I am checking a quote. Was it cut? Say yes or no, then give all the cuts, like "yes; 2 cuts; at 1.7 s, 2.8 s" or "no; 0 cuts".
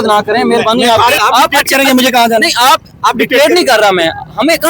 yes; 1 cut; at 1.2 s